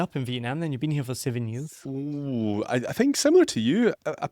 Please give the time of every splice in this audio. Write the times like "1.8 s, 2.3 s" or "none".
1.9 s